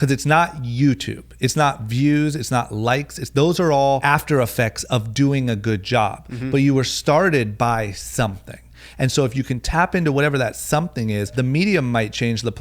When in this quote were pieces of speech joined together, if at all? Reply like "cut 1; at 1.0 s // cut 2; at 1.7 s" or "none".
cut 1; at 4.0 s // cut 2; at 11.3 s